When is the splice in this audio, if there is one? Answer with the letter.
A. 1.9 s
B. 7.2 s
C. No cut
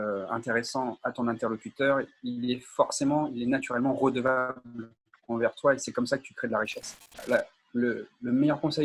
B